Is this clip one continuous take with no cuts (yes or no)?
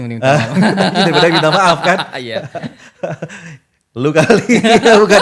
yes